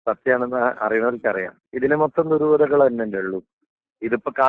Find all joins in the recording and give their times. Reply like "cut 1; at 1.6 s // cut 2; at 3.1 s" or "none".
cut 1; at 1.6 s

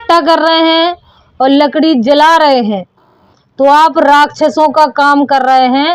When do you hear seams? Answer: none

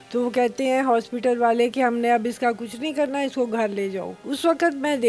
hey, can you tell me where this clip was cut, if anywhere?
cut 1; at 4.1 s

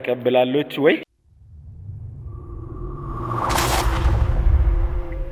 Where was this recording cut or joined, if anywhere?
cut 1; at 1.2 s

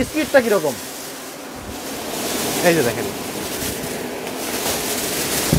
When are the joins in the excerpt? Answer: none

